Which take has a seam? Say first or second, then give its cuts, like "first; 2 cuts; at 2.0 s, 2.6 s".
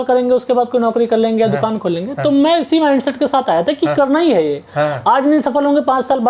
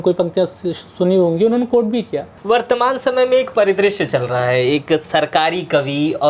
second; 1 cut; at 2.3 s